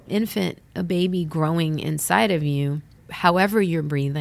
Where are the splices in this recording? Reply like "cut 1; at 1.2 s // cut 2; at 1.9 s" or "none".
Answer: cut 1; at 3.0 s